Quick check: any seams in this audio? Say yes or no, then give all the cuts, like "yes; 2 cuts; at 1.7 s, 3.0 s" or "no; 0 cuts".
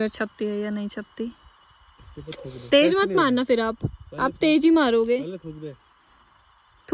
no; 0 cuts